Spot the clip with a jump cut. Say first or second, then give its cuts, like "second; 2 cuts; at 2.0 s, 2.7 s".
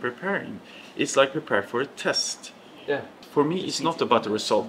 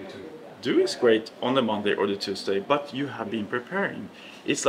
first; 1 cut; at 3.2 s